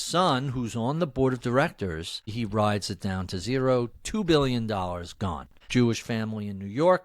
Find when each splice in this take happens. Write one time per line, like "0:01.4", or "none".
0:02.3
0:05.5